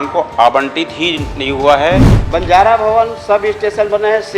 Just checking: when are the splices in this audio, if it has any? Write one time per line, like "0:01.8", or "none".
0:02.2